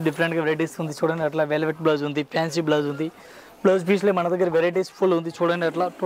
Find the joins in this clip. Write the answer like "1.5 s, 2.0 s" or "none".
none